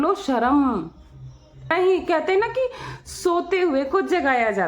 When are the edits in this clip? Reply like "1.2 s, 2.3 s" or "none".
1.7 s